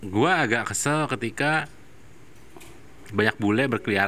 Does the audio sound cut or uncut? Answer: uncut